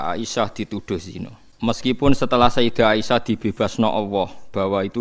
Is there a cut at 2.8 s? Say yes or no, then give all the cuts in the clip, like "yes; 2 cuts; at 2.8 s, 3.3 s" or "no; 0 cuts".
no; 1 cut; at 1.4 s